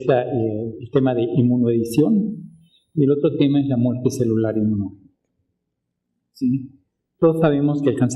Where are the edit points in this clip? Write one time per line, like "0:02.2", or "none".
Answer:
0:01.1